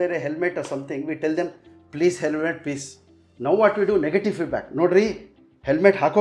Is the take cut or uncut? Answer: uncut